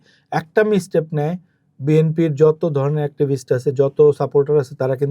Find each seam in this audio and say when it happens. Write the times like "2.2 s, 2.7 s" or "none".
none